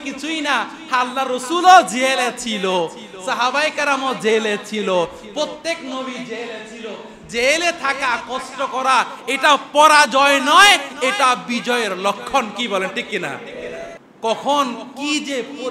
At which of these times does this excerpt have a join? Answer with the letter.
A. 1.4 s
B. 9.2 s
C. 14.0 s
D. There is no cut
C